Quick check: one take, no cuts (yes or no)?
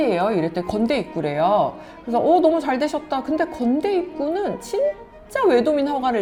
yes